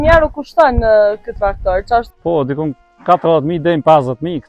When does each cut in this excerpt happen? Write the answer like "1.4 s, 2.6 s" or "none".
2.1 s